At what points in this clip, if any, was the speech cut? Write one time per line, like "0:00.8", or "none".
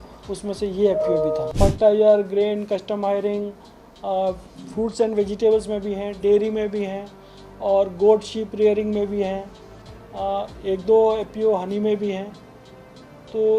0:01.5